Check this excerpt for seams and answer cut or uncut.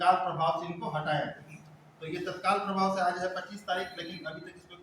uncut